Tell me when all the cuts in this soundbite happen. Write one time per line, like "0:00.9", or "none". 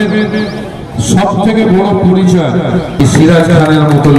0:03.0